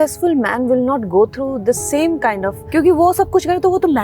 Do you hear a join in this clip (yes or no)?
yes